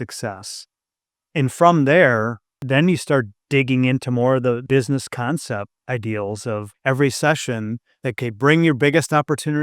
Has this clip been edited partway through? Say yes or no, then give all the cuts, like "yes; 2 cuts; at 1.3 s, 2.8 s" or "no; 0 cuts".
yes; 6 cuts; at 2.6 s, 3.4 s, 4.6 s, 5.8 s, 6.7 s, 8.2 s